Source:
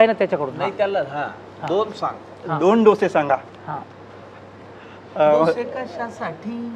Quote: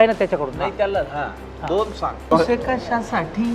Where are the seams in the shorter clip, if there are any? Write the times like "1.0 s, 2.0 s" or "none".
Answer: 2.3 s